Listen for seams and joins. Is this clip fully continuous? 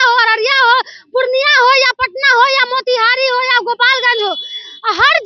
yes; 0 cuts

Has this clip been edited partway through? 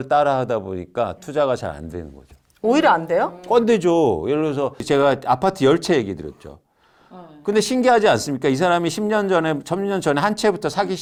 no; 0 cuts

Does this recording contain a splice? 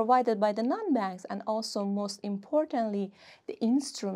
no; 0 cuts

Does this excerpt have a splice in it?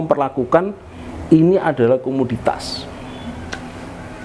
no; 0 cuts

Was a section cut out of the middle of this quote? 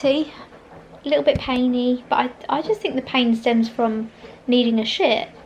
no; 0 cuts

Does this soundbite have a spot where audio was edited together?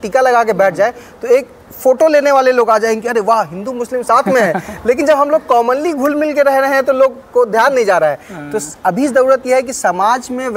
no; 0 cuts

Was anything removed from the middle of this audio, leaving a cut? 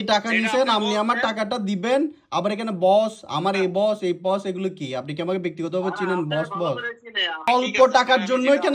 yes; 1 cut; at 7.5 s

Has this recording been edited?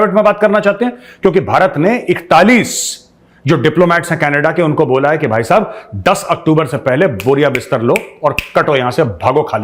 no; 0 cuts

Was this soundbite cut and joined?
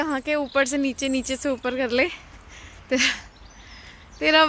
no; 0 cuts

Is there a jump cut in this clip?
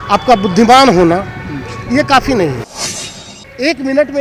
yes; 1 cut; at 3.1 s

